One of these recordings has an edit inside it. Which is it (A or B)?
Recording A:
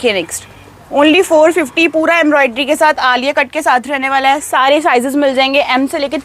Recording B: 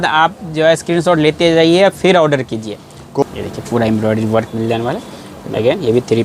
B